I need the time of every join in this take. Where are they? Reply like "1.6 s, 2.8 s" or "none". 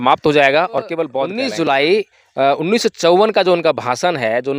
1.3 s